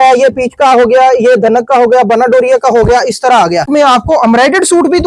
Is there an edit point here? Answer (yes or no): yes